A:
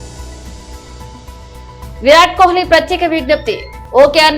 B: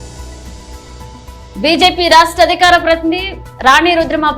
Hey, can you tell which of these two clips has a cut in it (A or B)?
A